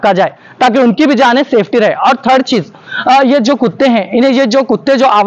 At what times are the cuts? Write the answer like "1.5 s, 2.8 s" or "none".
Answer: none